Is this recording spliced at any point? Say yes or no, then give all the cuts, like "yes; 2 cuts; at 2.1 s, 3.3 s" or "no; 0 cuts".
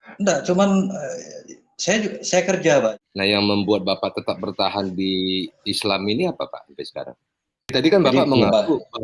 yes; 2 cuts; at 2.9 s, 7.7 s